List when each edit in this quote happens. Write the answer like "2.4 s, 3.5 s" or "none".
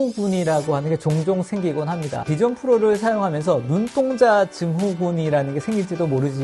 2.3 s